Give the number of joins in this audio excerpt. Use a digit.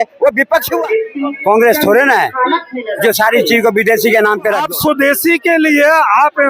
2